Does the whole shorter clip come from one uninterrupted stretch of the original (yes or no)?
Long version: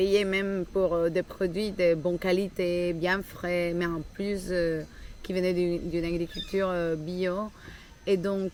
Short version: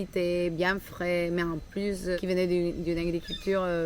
no